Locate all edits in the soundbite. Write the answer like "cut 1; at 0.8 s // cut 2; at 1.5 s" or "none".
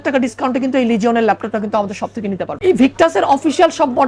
cut 1; at 2.5 s